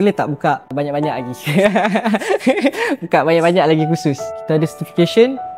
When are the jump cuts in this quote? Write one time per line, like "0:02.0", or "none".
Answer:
0:04.3